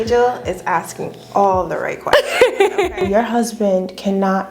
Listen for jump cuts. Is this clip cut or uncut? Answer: cut